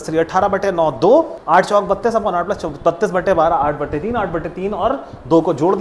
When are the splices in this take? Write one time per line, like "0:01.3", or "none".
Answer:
0:01.4